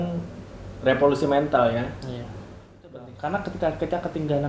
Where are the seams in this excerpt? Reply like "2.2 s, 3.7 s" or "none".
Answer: 2.9 s